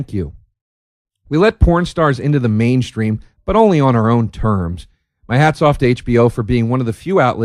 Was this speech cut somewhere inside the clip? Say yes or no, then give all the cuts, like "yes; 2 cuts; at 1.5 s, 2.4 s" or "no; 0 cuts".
no; 0 cuts